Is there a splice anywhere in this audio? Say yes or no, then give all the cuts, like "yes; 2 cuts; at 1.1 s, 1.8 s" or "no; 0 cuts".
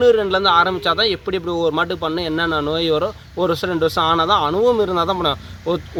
no; 0 cuts